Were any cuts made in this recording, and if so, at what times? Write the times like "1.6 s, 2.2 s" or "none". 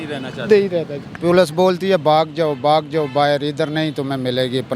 1.0 s

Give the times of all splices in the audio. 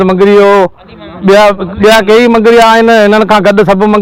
none

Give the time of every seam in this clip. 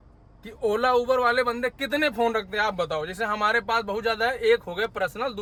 none

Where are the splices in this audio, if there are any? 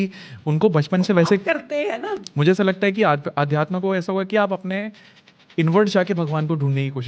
2.1 s

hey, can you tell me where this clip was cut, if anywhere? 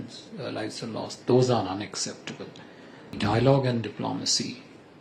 3.2 s

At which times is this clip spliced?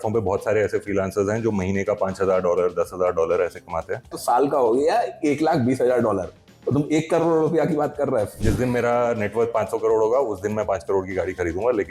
4.1 s, 8.4 s

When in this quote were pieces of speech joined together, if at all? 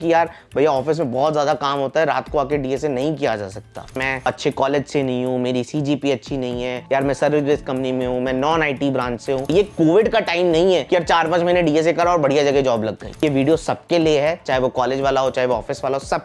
3.9 s, 9.5 s, 13.2 s

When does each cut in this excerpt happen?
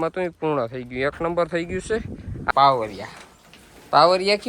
2.5 s

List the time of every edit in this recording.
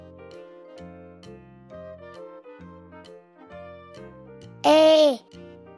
4.6 s

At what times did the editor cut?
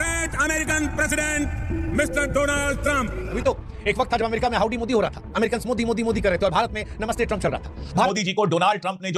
3.4 s, 8.1 s

